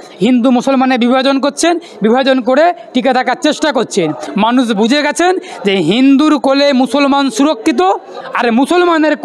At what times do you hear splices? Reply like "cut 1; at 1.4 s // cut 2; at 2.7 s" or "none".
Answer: cut 1; at 4.2 s